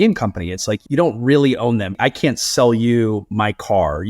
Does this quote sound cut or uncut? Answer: cut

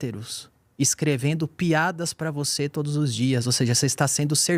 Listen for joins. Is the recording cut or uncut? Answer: uncut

